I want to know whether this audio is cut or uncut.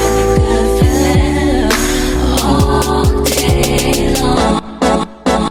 uncut